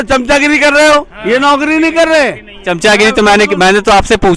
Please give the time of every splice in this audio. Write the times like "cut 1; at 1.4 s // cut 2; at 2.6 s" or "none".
none